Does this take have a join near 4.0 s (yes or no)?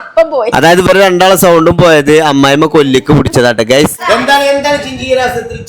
yes